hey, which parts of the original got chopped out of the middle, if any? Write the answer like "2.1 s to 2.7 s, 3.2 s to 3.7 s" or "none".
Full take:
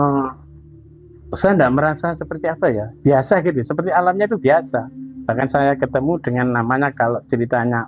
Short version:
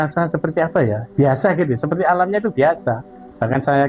none